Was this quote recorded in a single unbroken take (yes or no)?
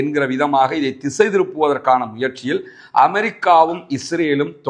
yes